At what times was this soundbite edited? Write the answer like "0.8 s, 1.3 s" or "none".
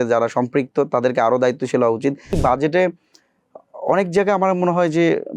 2.4 s

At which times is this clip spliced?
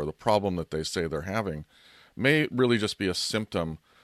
none

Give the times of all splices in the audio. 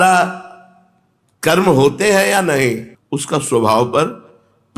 2.9 s

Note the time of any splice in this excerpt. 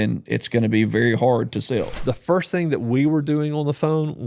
1.9 s

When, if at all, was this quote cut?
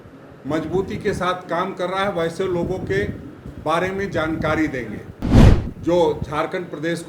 5.5 s

